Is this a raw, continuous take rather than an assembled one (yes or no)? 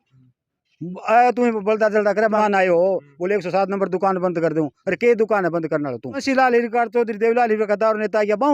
no